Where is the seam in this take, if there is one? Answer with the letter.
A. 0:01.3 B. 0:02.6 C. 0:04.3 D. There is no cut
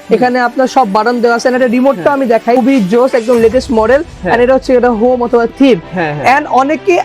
B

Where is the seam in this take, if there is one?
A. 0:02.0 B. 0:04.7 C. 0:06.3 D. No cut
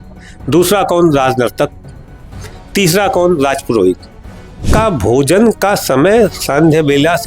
B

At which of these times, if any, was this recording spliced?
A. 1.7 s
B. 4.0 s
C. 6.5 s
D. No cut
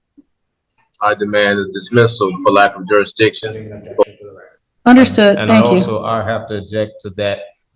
B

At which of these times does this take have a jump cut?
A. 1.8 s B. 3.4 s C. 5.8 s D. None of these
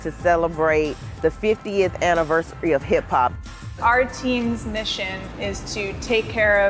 B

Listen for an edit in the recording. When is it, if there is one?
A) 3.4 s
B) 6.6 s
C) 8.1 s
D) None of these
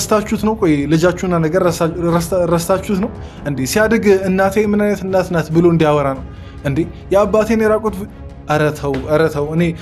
D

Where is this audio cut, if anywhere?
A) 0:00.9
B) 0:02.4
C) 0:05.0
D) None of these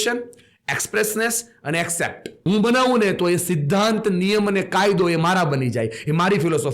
B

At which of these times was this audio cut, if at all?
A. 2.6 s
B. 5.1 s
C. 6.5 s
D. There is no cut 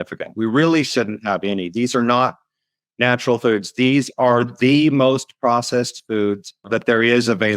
C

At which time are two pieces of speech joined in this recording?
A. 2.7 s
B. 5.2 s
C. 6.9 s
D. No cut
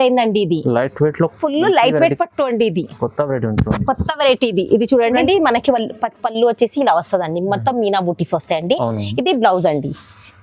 B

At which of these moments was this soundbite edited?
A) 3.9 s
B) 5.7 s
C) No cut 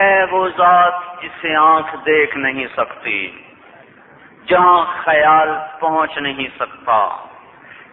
A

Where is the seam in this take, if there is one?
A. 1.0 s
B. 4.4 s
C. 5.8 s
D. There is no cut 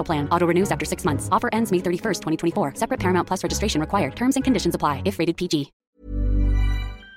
C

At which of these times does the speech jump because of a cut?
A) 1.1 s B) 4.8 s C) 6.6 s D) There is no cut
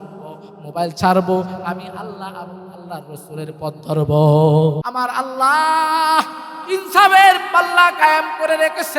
B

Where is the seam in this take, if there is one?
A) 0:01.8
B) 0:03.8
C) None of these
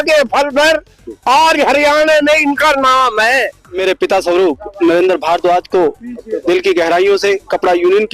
B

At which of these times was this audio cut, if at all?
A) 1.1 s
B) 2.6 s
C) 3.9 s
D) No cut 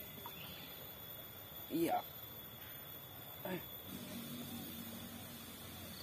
C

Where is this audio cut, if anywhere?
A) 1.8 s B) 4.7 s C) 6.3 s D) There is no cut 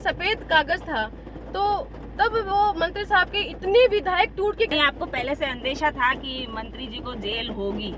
B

